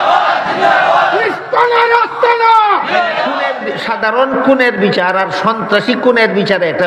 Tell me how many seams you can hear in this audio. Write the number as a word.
one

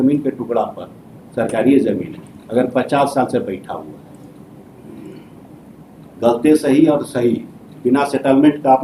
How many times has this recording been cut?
zero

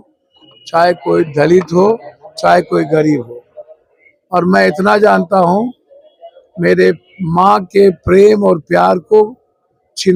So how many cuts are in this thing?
zero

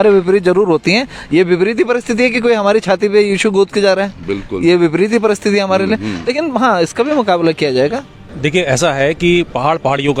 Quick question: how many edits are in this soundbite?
one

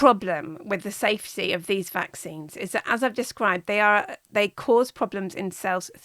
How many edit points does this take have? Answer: zero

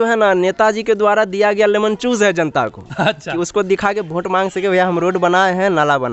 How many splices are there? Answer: zero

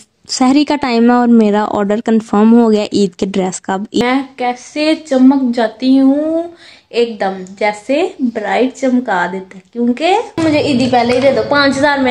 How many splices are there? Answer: two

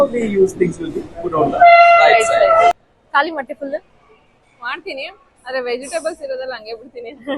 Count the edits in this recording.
one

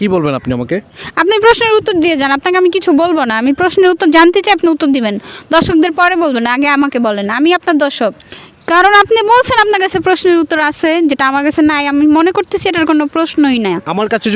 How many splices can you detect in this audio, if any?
one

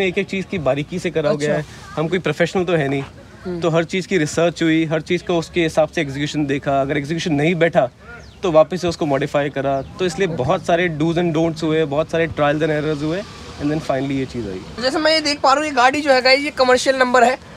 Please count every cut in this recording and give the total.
zero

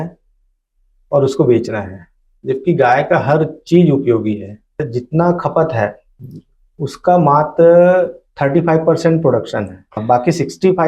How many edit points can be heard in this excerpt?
two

